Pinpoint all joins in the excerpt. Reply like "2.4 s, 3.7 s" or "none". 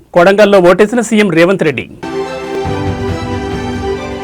none